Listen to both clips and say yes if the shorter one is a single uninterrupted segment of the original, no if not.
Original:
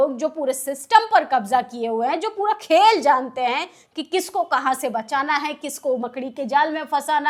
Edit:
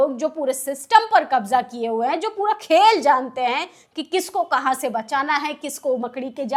yes